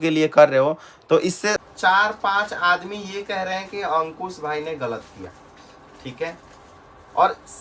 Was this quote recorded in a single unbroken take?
no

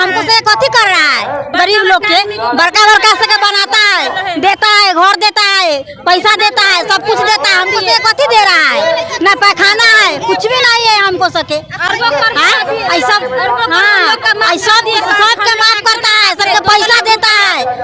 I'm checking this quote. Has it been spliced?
no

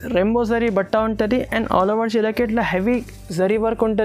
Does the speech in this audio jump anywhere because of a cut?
no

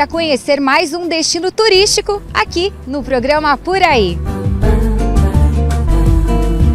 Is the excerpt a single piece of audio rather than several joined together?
yes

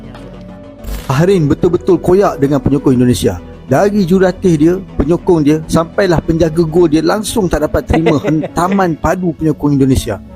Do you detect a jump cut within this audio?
yes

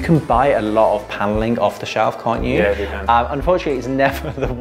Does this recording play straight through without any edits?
yes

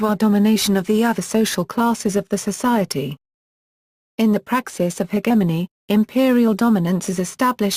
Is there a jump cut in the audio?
no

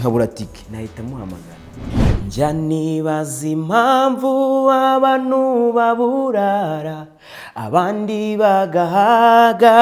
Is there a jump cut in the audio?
yes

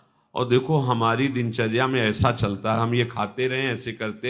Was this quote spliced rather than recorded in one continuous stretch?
no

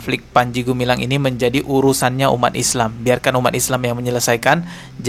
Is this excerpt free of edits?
yes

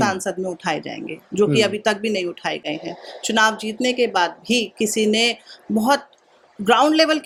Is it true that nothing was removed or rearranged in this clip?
yes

